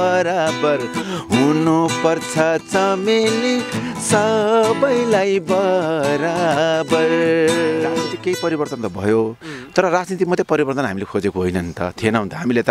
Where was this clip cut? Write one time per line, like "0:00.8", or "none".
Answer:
0:08.1